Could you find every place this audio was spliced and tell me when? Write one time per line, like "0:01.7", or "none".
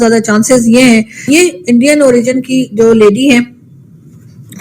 0:01.3